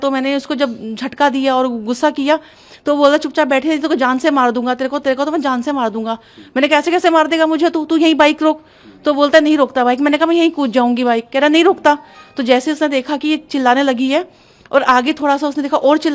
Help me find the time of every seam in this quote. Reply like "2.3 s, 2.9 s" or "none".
none